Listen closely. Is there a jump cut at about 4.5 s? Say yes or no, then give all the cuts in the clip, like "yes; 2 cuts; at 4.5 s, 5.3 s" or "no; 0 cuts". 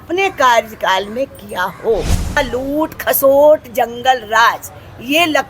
no; 1 cut; at 2.4 s